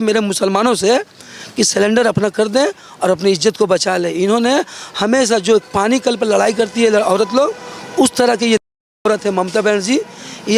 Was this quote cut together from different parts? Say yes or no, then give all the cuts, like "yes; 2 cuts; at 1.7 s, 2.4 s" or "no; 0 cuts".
no; 0 cuts